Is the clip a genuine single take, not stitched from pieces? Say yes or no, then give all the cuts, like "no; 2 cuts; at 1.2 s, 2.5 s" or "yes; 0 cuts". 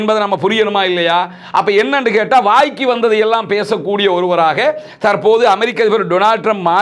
yes; 0 cuts